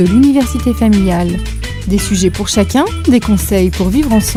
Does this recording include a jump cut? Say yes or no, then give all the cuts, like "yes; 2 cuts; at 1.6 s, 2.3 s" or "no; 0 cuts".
no; 0 cuts